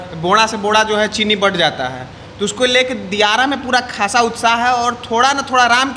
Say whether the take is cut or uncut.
uncut